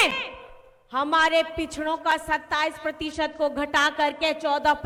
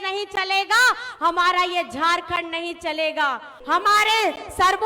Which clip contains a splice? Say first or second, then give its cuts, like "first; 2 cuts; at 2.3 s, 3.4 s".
second; 1 cut; at 3.5 s